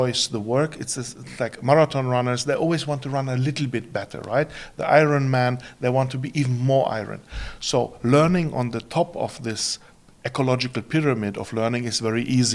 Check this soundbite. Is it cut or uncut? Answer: uncut